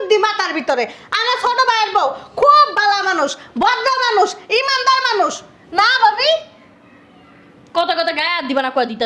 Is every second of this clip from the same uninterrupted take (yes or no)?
yes